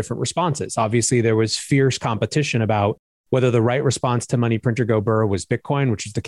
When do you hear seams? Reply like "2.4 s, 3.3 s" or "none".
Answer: none